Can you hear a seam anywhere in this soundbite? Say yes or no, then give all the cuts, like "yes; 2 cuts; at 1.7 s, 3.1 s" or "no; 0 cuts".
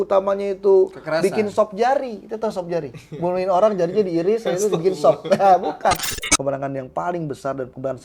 yes; 1 cut; at 6.1 s